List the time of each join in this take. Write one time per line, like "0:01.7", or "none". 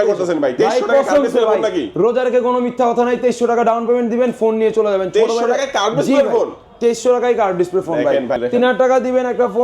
0:08.4